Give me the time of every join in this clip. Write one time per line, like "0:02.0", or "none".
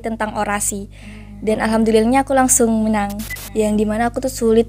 0:03.2